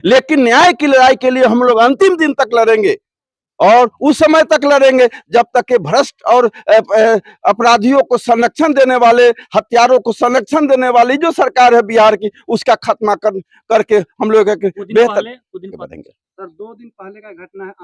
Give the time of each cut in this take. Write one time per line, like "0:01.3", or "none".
0:15.8